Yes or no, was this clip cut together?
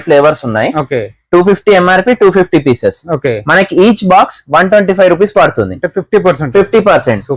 no